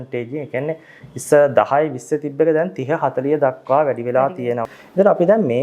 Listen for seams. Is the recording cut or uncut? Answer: cut